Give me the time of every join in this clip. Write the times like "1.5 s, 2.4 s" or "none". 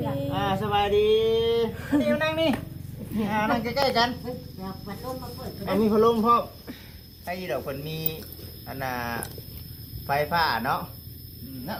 none